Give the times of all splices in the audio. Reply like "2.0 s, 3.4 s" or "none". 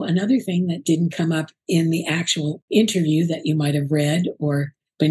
0.8 s, 2.6 s